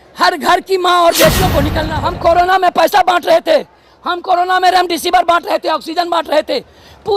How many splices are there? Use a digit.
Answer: 1